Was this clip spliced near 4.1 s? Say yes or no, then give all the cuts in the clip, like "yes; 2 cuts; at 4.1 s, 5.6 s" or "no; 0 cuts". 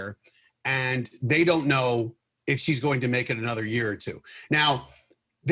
no; 0 cuts